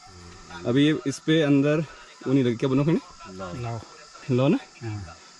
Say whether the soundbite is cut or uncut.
uncut